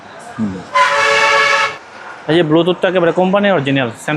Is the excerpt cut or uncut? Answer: cut